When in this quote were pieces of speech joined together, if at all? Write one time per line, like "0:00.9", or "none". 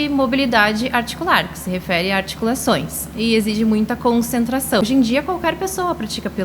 0:04.8